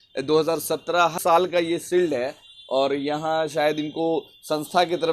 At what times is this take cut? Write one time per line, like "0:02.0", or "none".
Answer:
0:01.1